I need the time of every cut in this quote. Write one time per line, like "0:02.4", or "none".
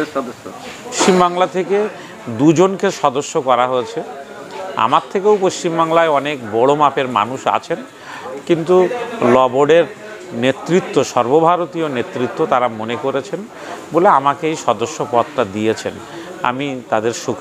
0:01.0